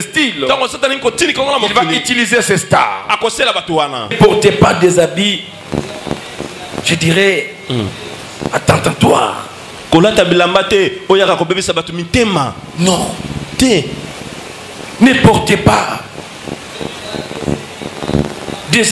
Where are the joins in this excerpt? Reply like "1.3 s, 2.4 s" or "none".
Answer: 4.1 s